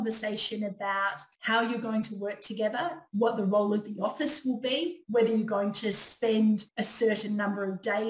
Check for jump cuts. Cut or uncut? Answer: cut